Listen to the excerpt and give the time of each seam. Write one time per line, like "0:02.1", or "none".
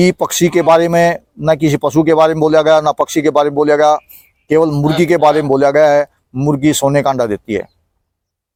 none